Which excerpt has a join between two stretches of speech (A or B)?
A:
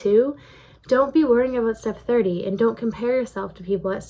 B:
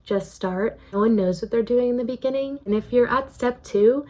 B